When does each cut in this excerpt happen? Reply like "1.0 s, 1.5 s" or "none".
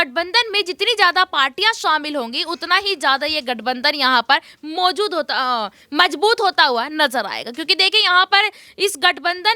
none